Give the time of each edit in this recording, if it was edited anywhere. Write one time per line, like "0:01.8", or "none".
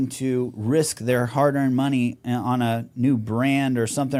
none